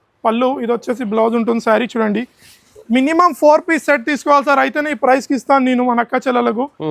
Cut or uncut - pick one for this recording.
uncut